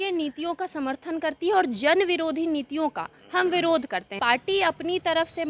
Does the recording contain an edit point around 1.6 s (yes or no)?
no